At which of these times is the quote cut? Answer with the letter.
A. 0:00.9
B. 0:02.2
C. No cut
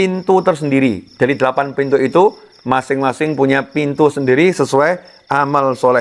C